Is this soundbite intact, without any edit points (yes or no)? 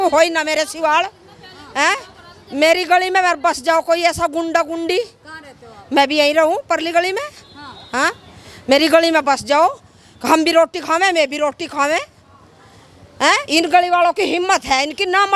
yes